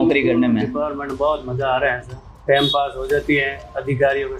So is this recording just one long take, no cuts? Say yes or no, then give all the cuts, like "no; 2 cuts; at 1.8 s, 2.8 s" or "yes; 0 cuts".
yes; 0 cuts